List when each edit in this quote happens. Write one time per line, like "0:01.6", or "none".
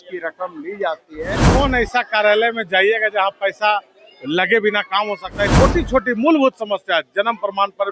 0:01.5
0:05.5